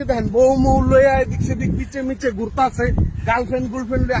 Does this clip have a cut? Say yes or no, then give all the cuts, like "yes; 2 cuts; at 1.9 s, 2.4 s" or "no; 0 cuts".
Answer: no; 0 cuts